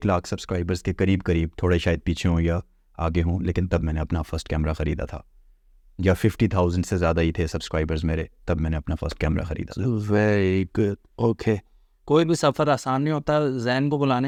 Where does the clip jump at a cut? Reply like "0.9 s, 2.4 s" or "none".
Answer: none